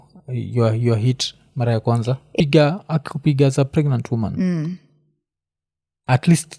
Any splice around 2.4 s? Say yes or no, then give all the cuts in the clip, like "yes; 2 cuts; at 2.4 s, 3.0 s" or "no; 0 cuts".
yes; 1 cut; at 2.4 s